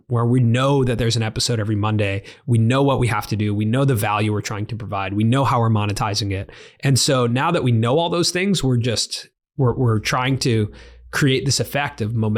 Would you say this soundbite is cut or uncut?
uncut